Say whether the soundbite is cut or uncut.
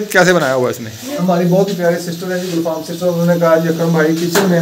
cut